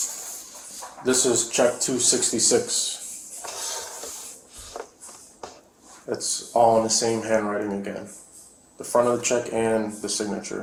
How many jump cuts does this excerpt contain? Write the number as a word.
zero